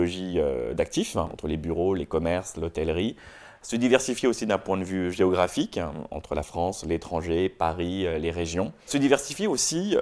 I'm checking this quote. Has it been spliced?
yes; 2 cuts; at 1.3 s, 8.9 s

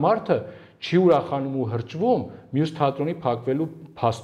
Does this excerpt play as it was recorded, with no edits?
yes; 0 cuts

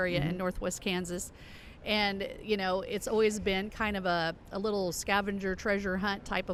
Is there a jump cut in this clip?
no; 0 cuts

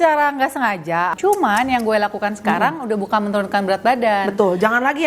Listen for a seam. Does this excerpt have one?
yes; 1 cut; at 1.1 s

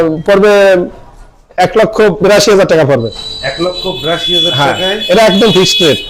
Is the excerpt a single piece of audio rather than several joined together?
yes; 0 cuts

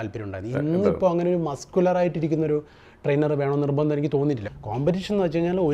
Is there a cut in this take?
yes; 1 cut; at 4.5 s

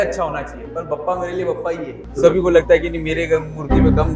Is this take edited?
yes; 1 cut; at 2.1 s

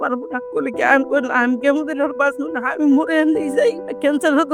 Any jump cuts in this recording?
no; 0 cuts

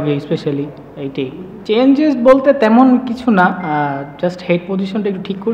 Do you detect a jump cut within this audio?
no; 0 cuts

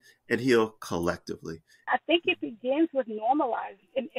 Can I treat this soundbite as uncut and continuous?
no; 1 cut; at 1.9 s

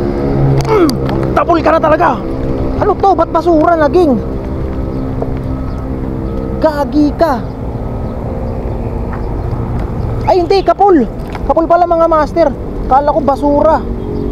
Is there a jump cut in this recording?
no; 0 cuts

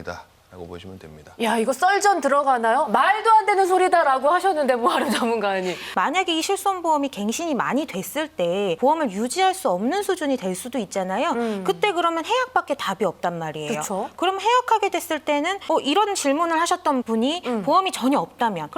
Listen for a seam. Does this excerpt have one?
yes; 1 cut; at 5.9 s

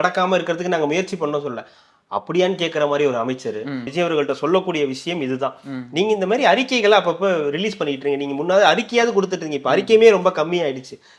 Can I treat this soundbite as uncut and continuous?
no; 1 cut; at 3.9 s

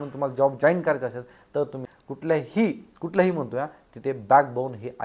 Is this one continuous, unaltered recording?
no; 1 cut; at 1.9 s

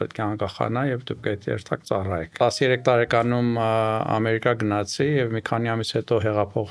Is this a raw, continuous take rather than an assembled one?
no; 1 cut; at 2.3 s

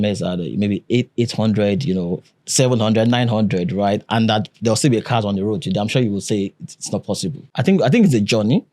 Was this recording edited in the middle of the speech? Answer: yes; 1 cut; at 7.5 s

